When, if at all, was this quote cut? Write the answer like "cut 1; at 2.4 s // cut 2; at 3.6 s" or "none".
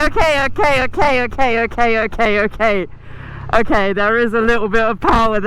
none